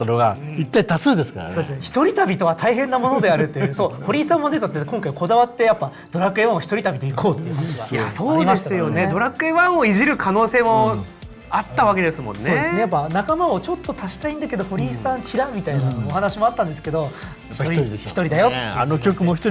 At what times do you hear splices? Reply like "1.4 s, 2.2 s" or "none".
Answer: 1.8 s